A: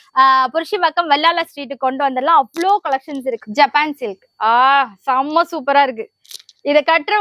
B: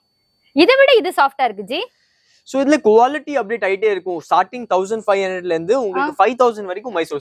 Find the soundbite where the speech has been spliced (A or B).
A